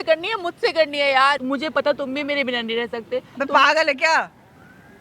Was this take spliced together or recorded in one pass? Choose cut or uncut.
cut